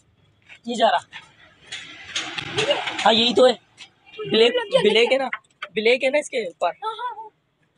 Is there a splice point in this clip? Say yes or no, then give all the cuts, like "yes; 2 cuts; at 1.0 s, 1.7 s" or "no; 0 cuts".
no; 0 cuts